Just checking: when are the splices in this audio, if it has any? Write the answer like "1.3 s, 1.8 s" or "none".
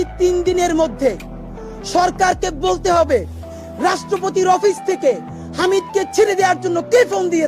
none